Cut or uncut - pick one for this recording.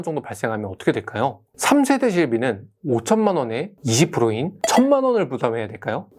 uncut